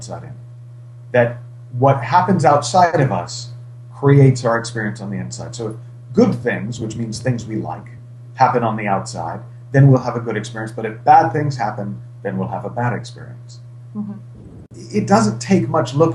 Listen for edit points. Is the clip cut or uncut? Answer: uncut